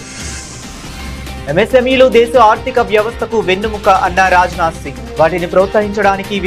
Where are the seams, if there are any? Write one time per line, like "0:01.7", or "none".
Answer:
none